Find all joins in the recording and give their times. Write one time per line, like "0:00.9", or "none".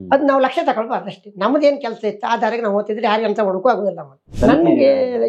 0:04.3